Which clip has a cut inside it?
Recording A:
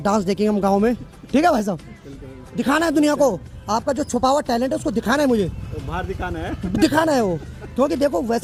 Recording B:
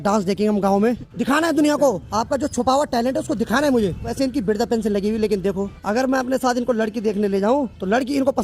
B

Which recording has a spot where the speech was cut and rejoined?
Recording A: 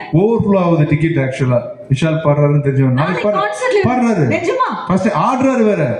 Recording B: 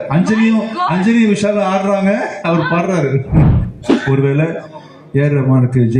B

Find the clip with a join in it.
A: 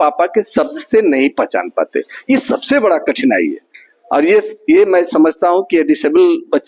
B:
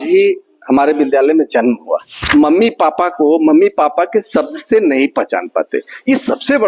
B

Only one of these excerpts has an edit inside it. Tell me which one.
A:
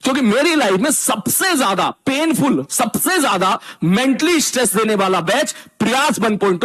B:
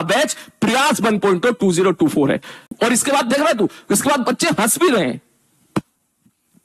B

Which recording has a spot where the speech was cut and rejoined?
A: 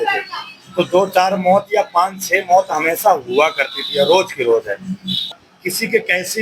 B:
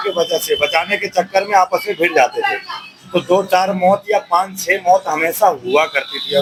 A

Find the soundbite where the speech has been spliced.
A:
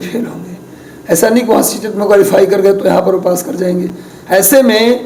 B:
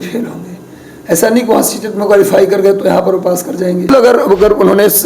B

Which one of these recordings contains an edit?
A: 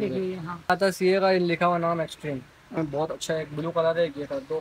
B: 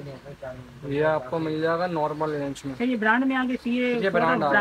A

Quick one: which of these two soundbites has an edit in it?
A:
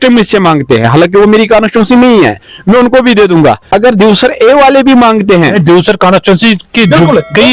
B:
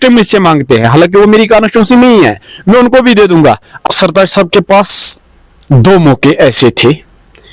B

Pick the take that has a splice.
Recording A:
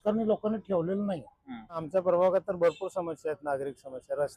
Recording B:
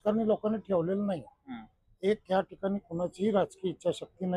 A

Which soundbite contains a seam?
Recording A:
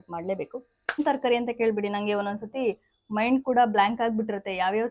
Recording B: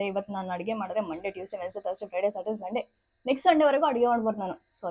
A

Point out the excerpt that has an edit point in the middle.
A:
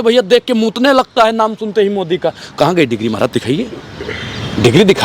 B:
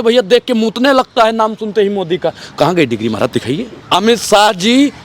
B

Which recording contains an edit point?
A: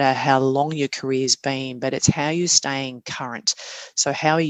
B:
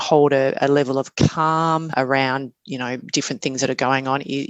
B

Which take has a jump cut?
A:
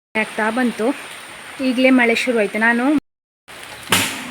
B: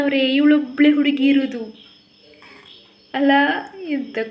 A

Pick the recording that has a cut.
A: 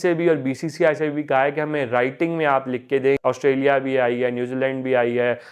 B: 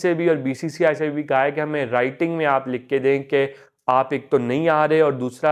A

